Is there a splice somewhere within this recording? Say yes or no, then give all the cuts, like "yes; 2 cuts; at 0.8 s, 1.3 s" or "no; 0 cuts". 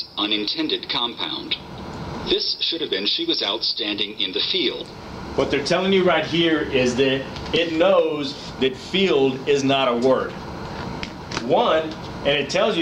no; 0 cuts